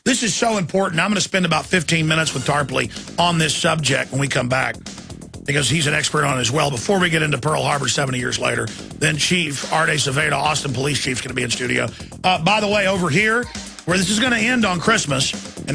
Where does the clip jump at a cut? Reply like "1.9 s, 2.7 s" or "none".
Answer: 11.1 s